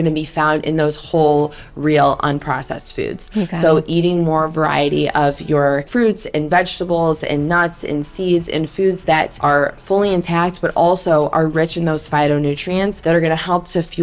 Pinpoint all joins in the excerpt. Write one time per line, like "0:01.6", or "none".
0:05.9
0:09.3
0:13.0